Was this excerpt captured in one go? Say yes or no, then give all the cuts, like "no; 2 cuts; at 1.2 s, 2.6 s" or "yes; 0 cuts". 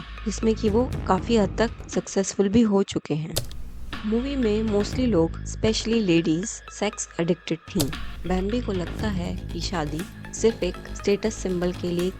no; 1 cut; at 8.1 s